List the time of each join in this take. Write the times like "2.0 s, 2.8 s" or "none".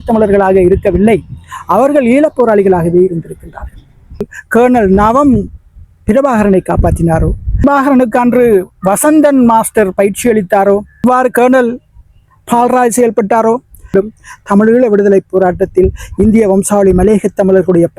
4.3 s, 7.6 s, 11.0 s, 13.9 s